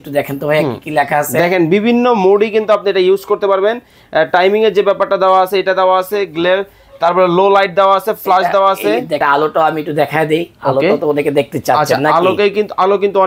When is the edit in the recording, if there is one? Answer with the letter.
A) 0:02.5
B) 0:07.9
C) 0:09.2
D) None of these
C